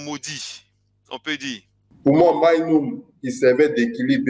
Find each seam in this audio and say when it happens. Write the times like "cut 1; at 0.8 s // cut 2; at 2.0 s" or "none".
cut 1; at 1.8 s

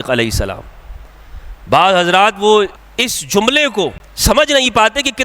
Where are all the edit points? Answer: cut 1; at 2.8 s // cut 2; at 4.1 s

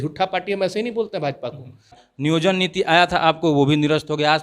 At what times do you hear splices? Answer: cut 1; at 2.1 s

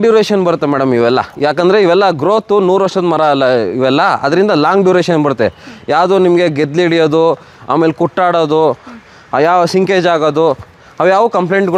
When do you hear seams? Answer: none

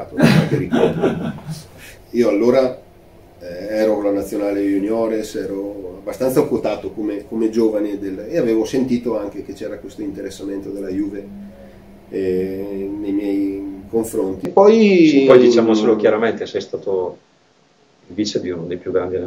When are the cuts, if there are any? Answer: cut 1; at 1.8 s // cut 2; at 14.5 s

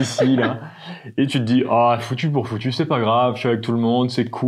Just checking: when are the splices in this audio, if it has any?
none

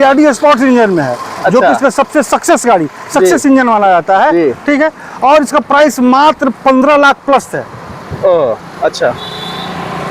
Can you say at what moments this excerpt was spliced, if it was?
none

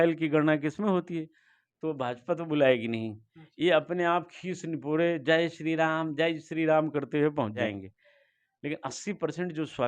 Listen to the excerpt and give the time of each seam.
cut 1; at 7.7 s

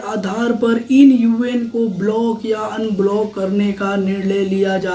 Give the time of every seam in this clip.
none

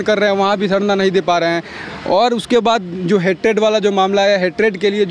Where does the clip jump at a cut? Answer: none

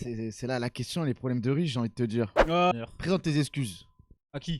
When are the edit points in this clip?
cut 1; at 2.7 s

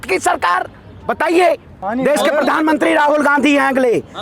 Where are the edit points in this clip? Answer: cut 1; at 1.8 s

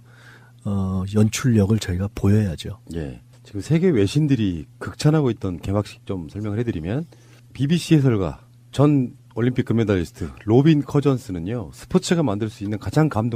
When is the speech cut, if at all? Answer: none

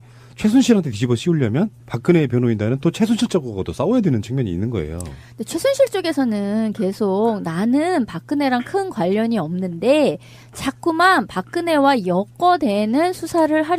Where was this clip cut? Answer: cut 1; at 1.6 s

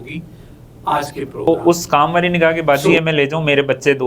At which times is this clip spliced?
cut 1; at 1.5 s

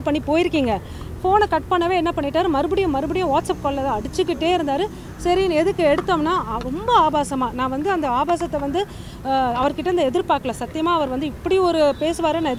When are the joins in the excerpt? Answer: cut 1; at 1.0 s

